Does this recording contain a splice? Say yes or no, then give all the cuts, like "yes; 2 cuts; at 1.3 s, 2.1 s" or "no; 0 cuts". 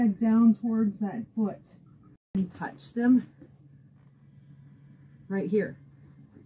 yes; 1 cut; at 2.3 s